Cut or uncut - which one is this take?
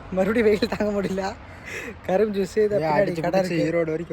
uncut